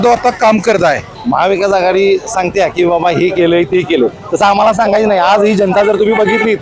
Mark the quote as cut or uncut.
cut